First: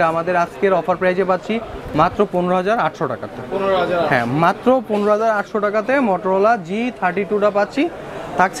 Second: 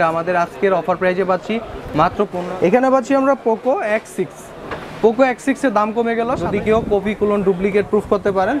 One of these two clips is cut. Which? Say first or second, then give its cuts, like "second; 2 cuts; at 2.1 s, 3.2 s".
second; 2 cuts; at 2.4 s, 6.4 s